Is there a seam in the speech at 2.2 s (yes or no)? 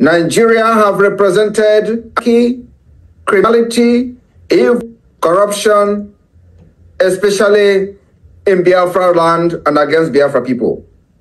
yes